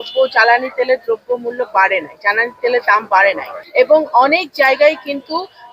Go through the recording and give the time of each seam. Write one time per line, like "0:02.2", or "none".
0:03.5